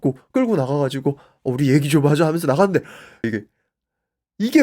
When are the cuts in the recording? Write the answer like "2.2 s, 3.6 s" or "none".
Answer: 3.2 s